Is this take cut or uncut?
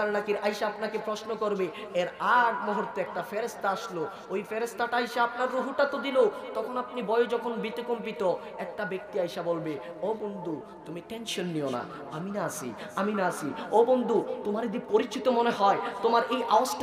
uncut